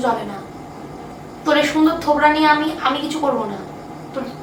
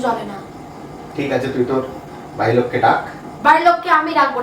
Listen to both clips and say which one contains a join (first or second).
second